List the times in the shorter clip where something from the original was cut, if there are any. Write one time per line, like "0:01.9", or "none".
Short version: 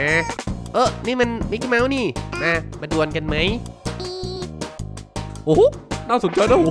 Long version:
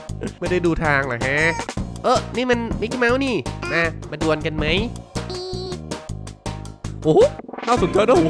0:05.4